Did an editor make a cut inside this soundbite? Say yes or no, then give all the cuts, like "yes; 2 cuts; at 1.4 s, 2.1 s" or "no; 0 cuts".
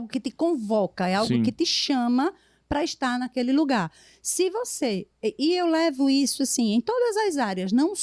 no; 0 cuts